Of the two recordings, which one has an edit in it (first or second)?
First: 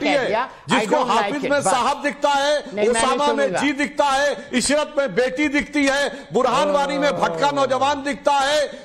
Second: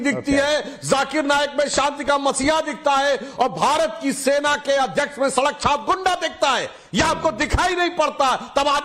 first